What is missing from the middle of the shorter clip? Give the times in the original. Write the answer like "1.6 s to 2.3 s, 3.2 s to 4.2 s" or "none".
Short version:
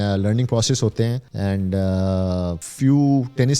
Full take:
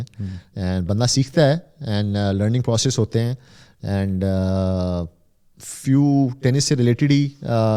3.4 s to 3.7 s, 5.1 s to 5.7 s